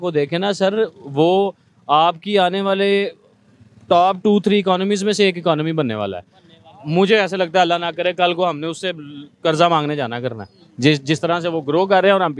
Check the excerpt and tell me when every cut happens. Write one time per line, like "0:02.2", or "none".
none